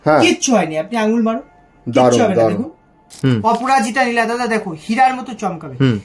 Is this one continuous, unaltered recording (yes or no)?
no